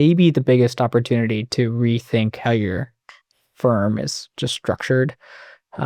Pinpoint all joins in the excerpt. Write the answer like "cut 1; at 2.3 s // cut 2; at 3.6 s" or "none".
none